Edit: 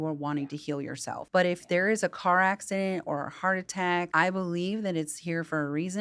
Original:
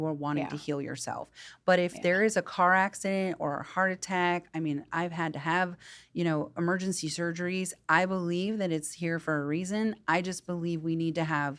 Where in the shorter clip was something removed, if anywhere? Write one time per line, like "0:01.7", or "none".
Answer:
0:01.2
0:04.1